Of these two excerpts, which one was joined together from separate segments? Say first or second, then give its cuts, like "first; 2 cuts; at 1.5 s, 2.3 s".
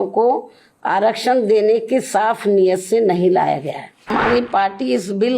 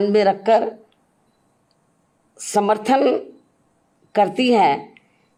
first; 1 cut; at 4.1 s